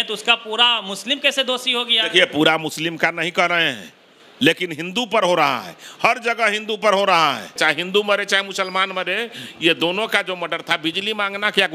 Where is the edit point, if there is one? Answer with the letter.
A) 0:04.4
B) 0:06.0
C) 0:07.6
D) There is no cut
C